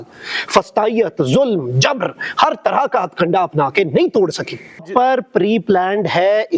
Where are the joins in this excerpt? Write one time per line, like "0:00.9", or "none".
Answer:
0:04.9